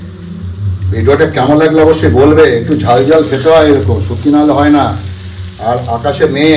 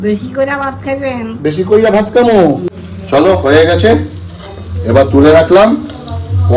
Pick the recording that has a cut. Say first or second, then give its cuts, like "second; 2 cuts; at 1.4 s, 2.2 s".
second; 1 cut; at 2.7 s